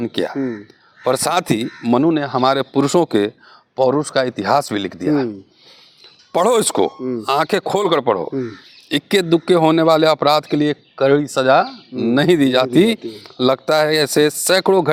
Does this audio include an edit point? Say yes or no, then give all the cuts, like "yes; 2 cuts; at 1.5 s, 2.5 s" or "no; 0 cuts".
no; 0 cuts